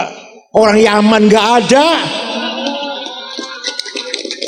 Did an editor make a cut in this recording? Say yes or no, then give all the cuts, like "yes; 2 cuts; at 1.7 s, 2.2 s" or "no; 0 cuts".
no; 0 cuts